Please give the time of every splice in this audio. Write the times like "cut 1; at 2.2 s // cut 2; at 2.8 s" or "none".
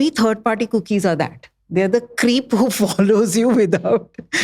none